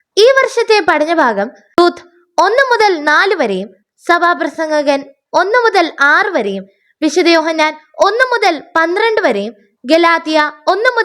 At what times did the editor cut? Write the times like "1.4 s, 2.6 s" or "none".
1.8 s

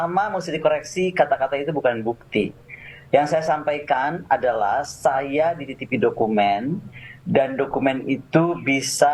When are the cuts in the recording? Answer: none

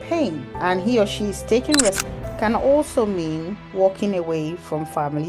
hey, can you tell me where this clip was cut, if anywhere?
2.1 s

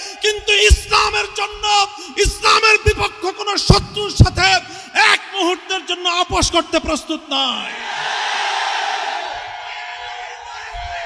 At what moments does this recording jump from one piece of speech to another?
none

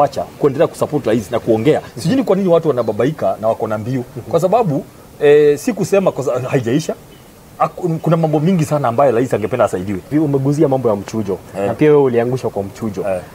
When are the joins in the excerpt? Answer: 1.9 s, 10.1 s

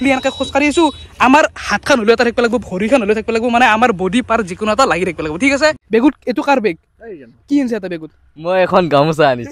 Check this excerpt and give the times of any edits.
5.8 s

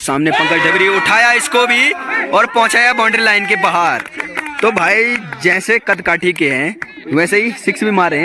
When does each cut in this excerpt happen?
none

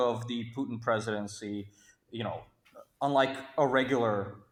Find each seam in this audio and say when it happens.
none

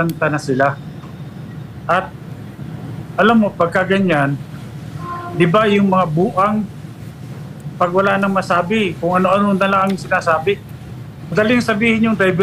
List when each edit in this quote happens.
11.3 s

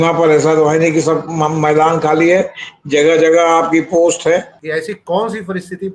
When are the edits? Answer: 4.6 s

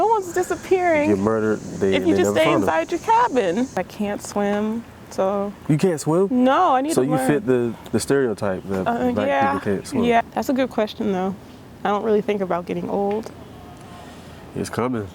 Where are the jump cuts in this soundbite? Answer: 3.8 s, 10.2 s

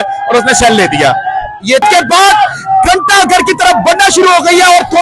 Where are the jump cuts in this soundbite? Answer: 1.8 s

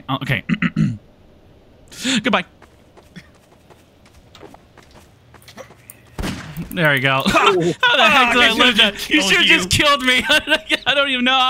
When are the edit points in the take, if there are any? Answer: 5.2 s

